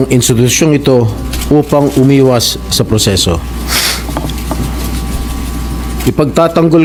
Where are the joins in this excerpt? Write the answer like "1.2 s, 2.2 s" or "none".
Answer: none